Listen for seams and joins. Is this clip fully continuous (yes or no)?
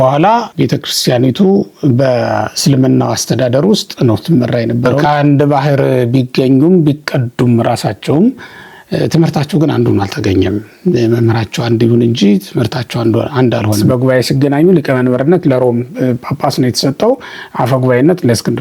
no